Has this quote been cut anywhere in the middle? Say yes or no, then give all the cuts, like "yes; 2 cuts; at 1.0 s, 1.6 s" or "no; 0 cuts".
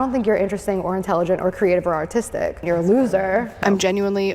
yes; 2 cuts; at 2.6 s, 3.6 s